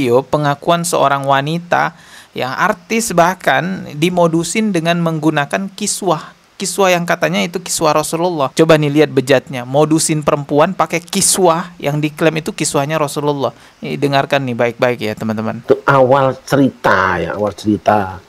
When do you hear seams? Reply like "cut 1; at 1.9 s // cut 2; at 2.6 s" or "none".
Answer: none